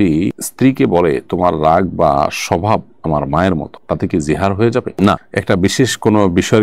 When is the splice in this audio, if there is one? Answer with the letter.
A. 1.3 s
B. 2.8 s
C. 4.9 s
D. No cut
D